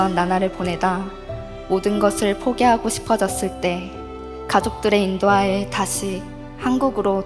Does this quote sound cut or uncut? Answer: uncut